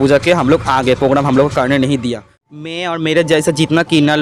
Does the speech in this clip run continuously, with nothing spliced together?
no; 1 cut; at 2.6 s

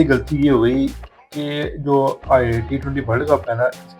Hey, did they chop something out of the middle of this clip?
no; 0 cuts

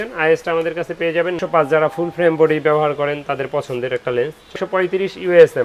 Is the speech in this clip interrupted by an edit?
yes; 2 cuts; at 1.4 s, 4.6 s

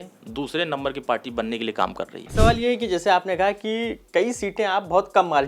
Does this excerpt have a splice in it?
yes; 1 cut; at 2.2 s

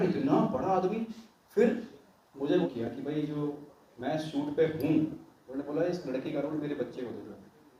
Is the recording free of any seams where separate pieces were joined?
no; 1 cut; at 2.7 s

